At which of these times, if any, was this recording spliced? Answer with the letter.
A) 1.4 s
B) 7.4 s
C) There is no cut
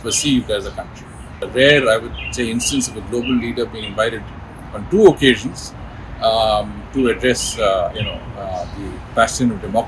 A